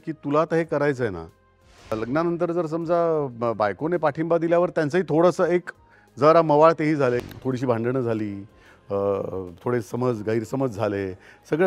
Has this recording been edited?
yes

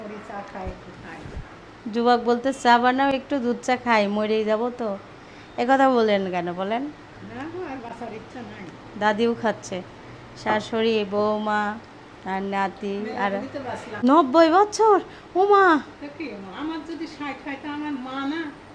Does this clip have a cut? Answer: yes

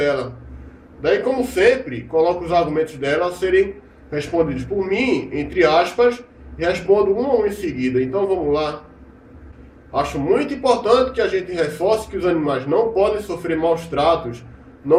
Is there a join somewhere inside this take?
no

